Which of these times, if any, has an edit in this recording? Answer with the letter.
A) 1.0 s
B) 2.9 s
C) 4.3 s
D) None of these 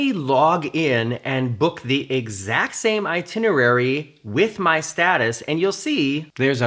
D